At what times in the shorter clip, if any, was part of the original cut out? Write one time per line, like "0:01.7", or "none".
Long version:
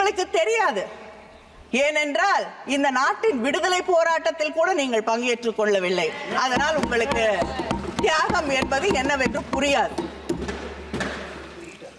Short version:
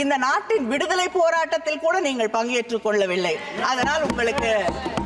none